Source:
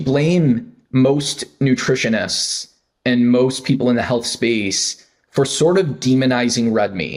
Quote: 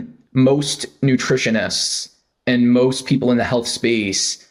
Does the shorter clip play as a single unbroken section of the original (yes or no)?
yes